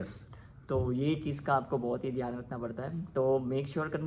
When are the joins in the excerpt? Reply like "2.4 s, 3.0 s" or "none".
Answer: none